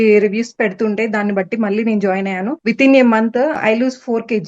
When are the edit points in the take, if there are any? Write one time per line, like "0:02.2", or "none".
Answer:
0:02.6
0:03.6